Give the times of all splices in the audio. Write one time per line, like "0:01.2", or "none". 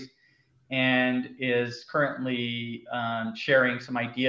none